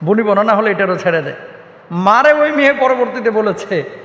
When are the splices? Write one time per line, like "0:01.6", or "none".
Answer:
none